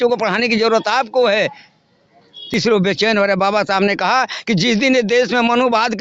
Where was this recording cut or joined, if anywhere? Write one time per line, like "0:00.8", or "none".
0:02.4